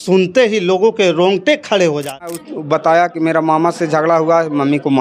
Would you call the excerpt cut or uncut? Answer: cut